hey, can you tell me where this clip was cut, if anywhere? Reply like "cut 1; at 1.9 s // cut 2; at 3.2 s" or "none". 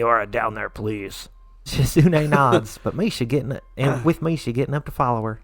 cut 1; at 1.6 s